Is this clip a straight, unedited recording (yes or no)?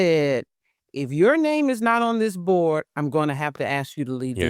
yes